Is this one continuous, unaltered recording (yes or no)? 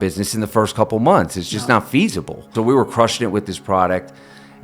no